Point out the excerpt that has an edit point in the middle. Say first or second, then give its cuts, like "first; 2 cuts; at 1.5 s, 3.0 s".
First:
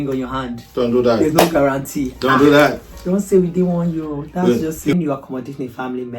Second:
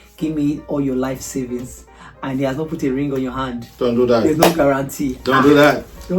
first; 1 cut; at 4.9 s